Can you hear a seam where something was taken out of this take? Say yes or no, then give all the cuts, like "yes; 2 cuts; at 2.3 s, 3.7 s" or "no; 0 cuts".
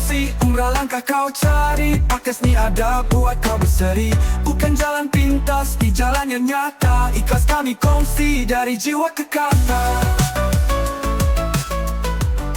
no; 0 cuts